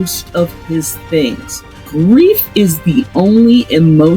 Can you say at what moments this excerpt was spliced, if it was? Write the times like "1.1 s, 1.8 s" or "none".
1.9 s